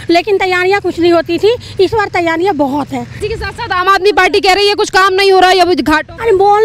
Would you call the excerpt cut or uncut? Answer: cut